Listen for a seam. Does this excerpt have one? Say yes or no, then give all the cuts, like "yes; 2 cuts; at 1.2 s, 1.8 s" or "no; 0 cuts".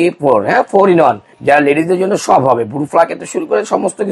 yes; 1 cut; at 1.3 s